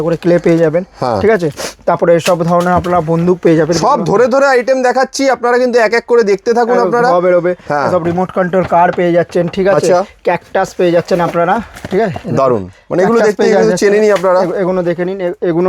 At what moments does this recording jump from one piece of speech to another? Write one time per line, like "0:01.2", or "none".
none